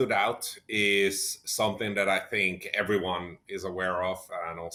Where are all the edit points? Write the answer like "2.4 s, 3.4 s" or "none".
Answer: none